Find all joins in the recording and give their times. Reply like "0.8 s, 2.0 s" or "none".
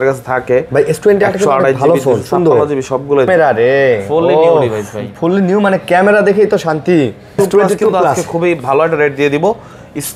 3.3 s, 7.4 s